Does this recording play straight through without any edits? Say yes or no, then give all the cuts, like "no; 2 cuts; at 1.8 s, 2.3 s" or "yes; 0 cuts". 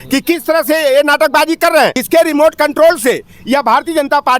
no; 1 cut; at 2.0 s